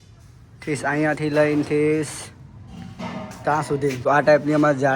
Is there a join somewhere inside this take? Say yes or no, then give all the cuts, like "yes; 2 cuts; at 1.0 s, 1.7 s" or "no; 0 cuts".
yes; 1 cut; at 4.1 s